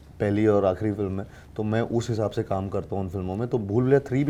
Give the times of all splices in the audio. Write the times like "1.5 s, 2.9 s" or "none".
none